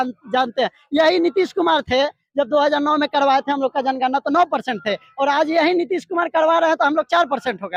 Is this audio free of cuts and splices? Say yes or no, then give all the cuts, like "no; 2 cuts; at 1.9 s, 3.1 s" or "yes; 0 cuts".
yes; 0 cuts